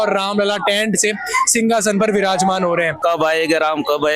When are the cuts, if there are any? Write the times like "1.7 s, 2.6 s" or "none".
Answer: 2.9 s